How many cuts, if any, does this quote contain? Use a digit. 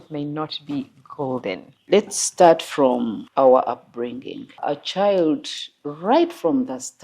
3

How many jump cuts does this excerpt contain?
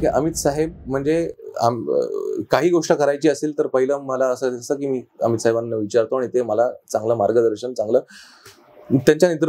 0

